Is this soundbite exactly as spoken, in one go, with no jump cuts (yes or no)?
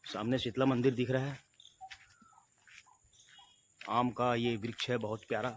yes